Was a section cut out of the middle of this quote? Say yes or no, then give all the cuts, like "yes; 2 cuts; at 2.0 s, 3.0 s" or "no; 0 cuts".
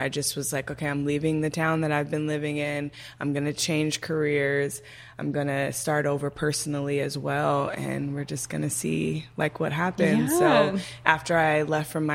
no; 0 cuts